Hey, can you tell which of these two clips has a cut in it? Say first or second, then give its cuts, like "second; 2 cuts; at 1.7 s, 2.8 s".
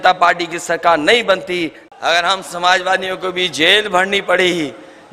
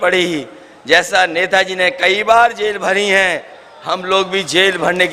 first; 1 cut; at 1.8 s